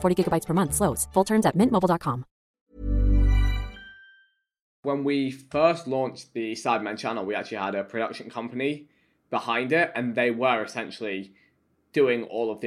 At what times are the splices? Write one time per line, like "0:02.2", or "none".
0:04.8